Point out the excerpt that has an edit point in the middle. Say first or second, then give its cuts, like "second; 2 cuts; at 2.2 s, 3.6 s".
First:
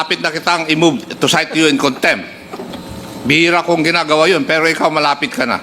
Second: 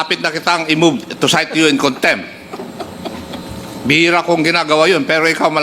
first; 1 cut; at 2.7 s